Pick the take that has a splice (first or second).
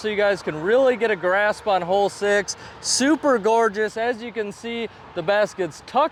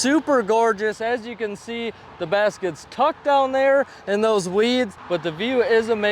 second